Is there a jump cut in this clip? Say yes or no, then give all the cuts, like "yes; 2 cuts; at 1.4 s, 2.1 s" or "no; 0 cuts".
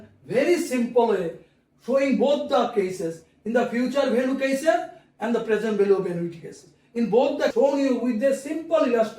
yes; 1 cut; at 7.5 s